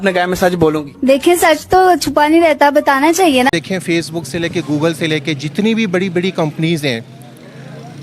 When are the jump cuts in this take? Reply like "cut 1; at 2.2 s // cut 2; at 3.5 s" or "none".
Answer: cut 1; at 3.5 s